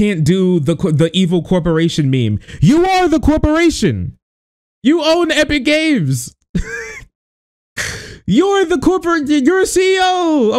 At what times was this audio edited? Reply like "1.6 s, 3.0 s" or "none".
none